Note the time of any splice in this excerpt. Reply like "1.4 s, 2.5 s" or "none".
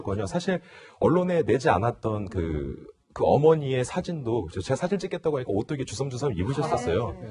4.6 s